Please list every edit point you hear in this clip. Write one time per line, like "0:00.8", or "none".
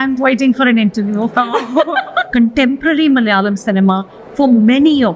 0:02.3